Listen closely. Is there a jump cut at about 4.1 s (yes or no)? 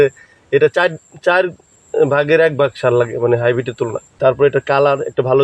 yes